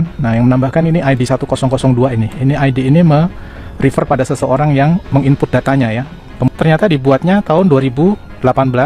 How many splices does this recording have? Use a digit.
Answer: 1